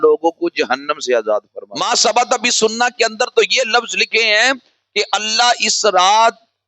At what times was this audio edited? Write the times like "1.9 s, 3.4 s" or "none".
1.6 s

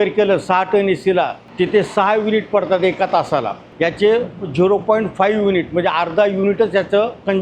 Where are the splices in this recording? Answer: 1.4 s, 3.6 s

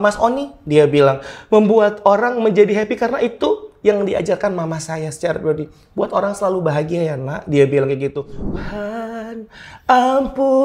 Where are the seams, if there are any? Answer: 8.5 s

